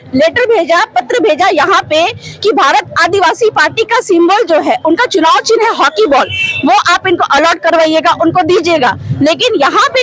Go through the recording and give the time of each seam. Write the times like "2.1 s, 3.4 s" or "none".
none